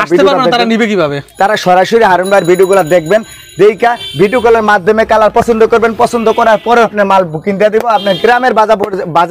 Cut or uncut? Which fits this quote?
cut